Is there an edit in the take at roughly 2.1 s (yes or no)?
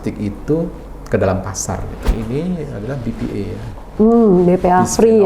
yes